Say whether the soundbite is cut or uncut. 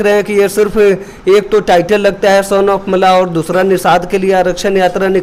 uncut